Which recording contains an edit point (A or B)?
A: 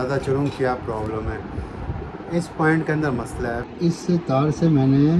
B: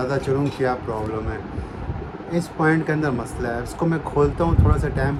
A